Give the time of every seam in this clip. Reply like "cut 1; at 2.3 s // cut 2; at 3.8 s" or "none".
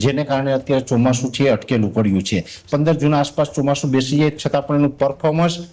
cut 1; at 2.6 s